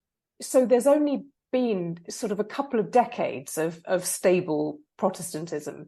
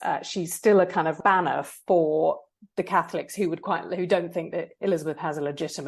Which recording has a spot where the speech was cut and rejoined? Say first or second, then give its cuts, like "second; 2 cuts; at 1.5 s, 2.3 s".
second; 1 cut; at 1.2 s